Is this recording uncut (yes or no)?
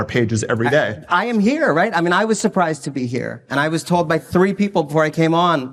yes